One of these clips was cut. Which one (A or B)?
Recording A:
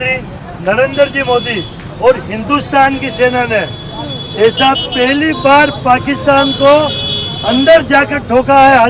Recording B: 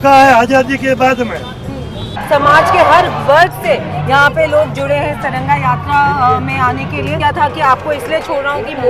B